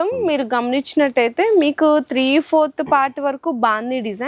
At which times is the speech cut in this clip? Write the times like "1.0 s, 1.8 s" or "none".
none